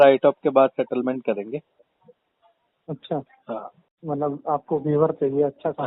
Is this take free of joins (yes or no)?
no